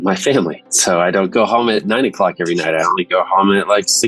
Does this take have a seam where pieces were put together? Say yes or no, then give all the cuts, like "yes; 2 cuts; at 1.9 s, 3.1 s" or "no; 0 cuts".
yes; 1 cut; at 1.3 s